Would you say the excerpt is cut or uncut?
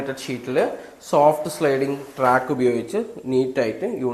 uncut